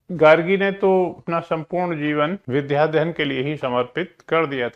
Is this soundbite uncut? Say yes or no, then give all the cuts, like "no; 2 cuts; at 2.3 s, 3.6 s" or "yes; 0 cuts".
no; 2 cuts; at 1.2 s, 2.4 s